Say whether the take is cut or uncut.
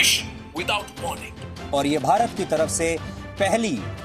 cut